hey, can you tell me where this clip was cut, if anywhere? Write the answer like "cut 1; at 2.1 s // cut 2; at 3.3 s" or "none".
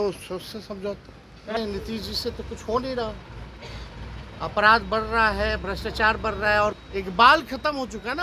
cut 1; at 1.6 s // cut 2; at 6.8 s